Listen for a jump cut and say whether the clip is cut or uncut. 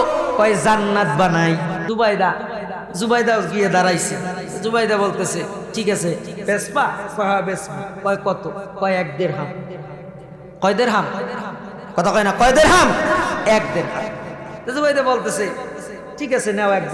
cut